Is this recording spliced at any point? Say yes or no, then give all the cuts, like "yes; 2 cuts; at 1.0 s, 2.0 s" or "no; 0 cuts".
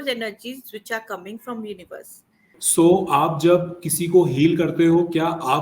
yes; 1 cut; at 2.6 s